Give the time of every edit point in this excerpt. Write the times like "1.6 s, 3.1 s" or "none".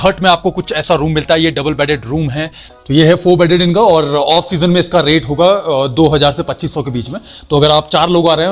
2.8 s